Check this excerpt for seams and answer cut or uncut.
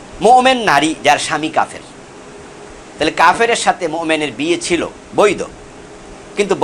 uncut